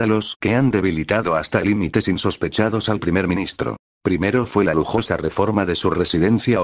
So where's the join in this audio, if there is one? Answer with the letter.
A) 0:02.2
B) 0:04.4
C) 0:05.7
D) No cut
B